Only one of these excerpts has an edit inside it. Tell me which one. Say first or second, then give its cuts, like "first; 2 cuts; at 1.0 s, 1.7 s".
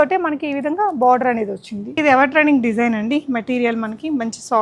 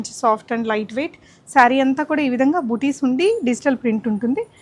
first; 1 cut; at 2.0 s